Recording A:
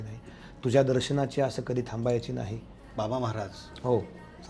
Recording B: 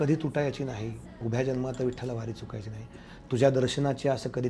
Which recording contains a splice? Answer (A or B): A